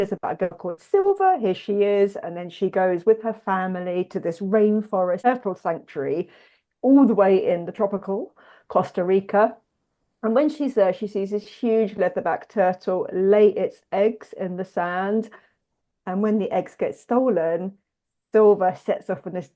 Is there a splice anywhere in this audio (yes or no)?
yes